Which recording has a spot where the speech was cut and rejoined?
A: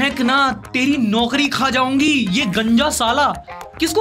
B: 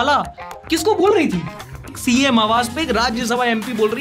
B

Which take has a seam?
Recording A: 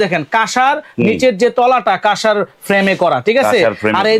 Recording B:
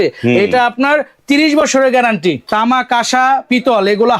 B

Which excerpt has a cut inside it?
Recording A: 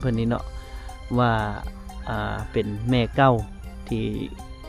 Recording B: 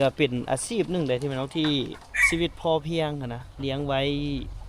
B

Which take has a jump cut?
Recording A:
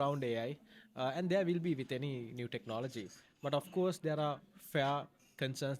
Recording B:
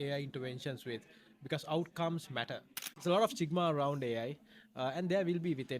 B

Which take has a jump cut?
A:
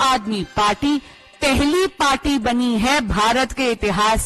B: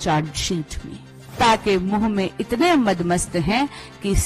B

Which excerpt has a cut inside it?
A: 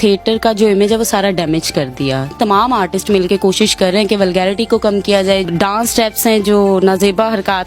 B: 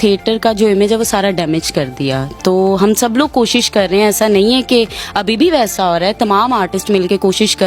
A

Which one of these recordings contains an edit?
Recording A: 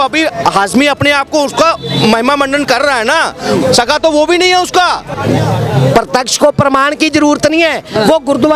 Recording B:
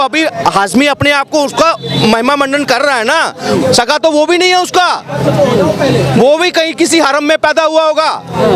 A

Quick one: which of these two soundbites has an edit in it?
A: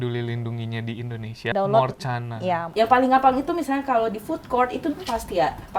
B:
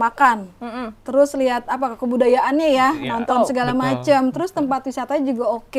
A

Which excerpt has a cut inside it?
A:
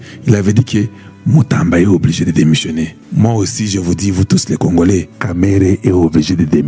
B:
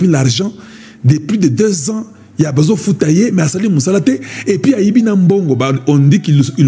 A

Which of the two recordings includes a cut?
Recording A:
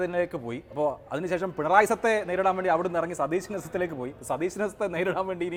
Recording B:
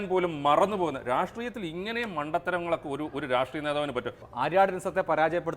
B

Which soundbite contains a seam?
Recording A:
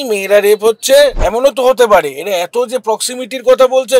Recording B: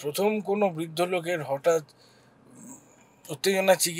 A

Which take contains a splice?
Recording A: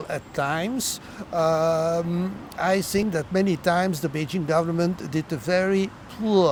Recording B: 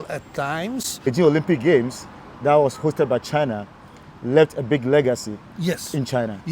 B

